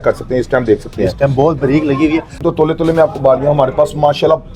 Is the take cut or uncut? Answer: cut